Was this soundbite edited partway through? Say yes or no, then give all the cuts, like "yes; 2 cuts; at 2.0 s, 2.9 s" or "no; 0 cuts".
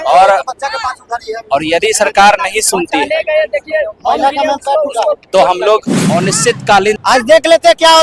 yes; 1 cut; at 7.0 s